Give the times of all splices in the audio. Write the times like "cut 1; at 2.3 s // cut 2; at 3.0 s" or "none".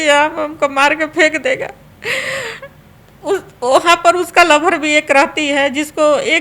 none